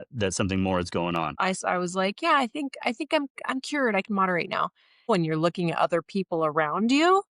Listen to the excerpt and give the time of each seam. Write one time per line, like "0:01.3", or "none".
0:01.3
0:05.1